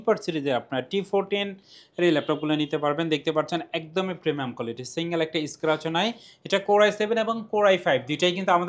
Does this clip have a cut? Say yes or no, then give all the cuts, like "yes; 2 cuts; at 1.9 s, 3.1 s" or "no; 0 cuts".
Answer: no; 0 cuts